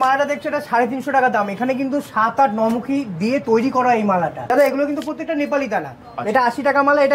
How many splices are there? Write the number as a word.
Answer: one